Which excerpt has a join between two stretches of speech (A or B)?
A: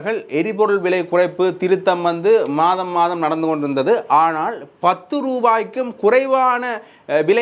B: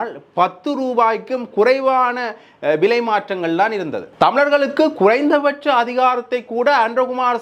B